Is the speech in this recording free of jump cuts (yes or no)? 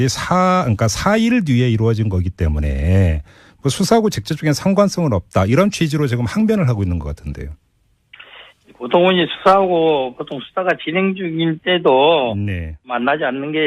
no